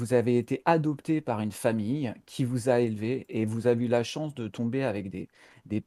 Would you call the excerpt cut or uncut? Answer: uncut